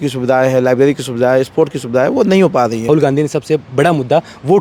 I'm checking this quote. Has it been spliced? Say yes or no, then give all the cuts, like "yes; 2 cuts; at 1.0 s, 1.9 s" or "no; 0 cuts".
yes; 1 cut; at 2.9 s